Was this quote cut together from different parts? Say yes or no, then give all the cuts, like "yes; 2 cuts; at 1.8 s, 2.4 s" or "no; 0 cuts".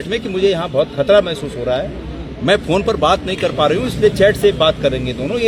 no; 0 cuts